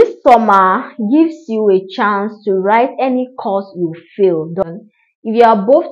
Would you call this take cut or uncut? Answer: cut